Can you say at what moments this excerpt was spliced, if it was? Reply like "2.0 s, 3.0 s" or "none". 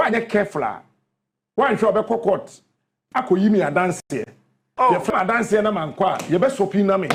none